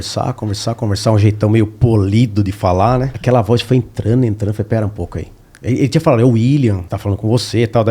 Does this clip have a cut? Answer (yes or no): yes